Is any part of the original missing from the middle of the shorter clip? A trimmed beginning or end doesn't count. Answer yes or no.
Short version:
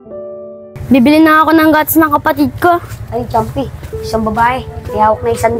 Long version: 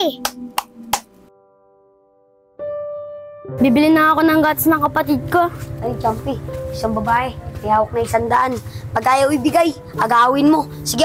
yes